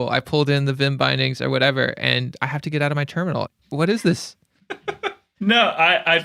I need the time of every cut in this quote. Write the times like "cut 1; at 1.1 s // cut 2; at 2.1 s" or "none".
cut 1; at 3.6 s // cut 2; at 5.2 s